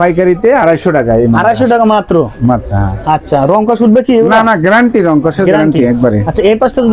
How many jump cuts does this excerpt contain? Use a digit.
0